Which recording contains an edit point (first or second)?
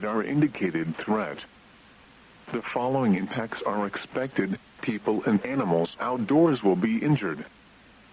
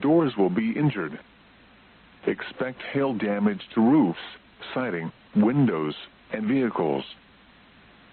first